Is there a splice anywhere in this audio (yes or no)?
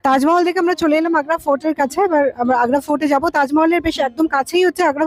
no